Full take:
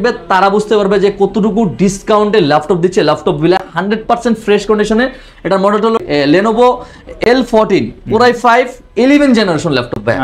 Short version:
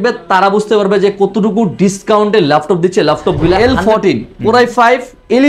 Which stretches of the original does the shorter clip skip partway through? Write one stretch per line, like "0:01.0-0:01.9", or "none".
0:03.6-0:07.2